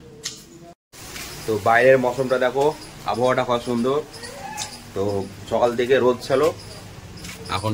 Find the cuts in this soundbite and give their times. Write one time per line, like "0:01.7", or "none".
0:01.1